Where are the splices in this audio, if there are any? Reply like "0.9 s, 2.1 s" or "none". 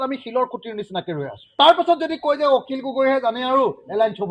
1.5 s